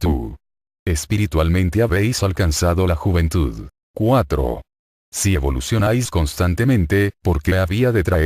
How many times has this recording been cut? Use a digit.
1